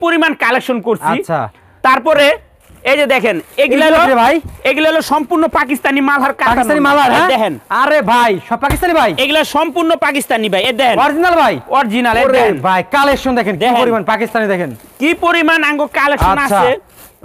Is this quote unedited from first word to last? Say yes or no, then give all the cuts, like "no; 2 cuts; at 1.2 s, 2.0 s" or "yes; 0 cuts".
yes; 0 cuts